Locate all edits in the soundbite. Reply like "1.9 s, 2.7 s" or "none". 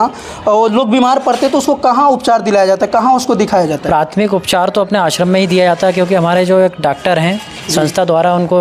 none